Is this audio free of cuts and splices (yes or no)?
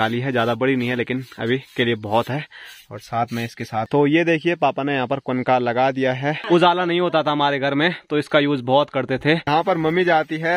no